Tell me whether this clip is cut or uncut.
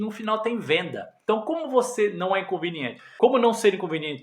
uncut